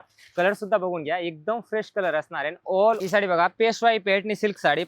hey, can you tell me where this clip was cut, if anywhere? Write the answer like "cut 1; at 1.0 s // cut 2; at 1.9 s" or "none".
cut 1; at 3.0 s